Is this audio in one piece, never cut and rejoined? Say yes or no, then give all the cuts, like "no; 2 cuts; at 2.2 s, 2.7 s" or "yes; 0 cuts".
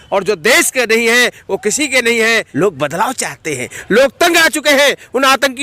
no; 1 cut; at 2.5 s